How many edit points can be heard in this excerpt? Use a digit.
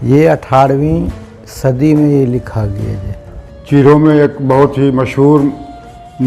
1